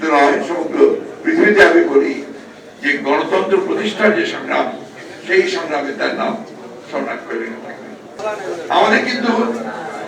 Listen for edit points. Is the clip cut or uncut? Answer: cut